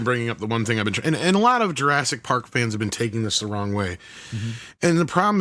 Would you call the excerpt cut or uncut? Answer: uncut